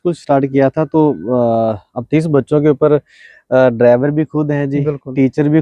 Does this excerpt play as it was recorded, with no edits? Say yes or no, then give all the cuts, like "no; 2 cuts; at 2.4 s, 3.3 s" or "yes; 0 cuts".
yes; 0 cuts